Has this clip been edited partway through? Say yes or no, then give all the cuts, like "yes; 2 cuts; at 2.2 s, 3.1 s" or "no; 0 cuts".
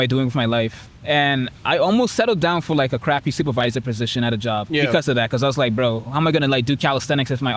yes; 2 cuts; at 0.9 s, 4.6 s